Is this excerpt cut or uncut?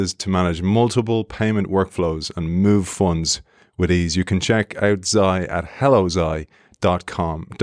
uncut